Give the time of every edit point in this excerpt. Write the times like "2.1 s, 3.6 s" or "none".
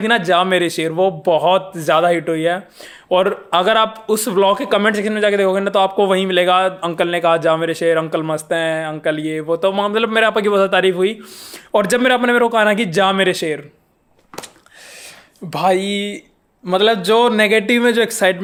none